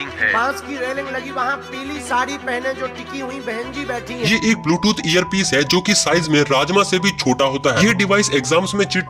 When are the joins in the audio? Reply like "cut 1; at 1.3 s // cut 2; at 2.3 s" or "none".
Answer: cut 1; at 4.2 s // cut 2; at 7.8 s